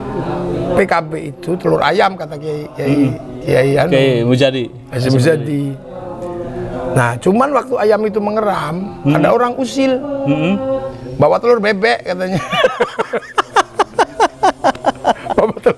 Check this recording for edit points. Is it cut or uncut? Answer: uncut